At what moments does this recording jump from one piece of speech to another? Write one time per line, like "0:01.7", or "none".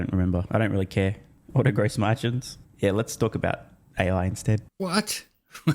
0:04.7

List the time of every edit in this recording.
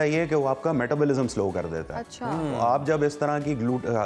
none

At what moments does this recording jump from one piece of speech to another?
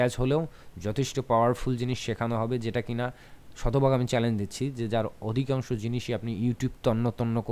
none

